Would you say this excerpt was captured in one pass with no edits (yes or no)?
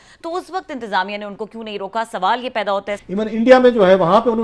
no